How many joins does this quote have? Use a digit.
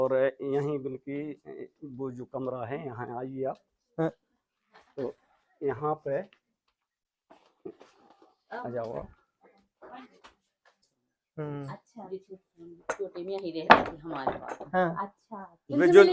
0